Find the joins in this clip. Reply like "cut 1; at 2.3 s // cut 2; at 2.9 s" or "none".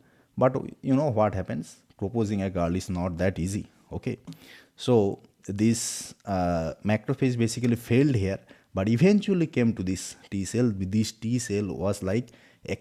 none